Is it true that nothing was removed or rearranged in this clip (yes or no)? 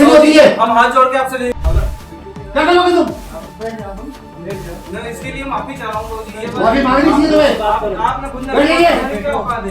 yes